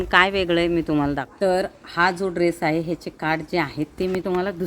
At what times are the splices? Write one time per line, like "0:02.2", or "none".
0:01.2